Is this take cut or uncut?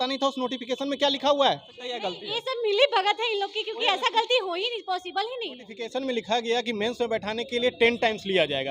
cut